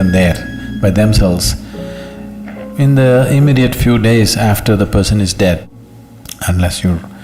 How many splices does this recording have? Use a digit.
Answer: 1